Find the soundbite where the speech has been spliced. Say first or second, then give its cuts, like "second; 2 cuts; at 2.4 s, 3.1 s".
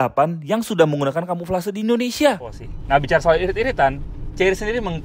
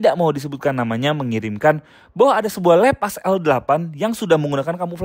first; 1 cut; at 2.7 s